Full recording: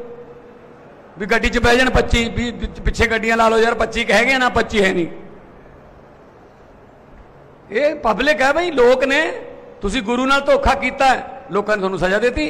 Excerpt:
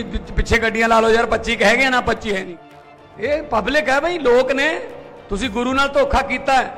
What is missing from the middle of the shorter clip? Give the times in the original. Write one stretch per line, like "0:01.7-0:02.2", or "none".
0:04.9-0:06.9